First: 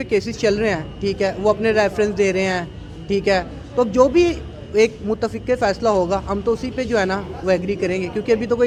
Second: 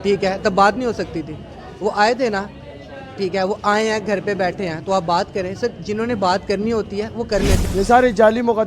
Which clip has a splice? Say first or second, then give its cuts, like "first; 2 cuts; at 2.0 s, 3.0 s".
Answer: second; 1 cut; at 7.6 s